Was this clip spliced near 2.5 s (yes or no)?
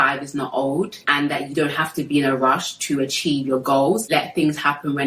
no